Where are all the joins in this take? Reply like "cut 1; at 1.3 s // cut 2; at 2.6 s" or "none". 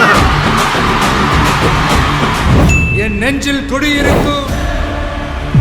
cut 1; at 2.5 s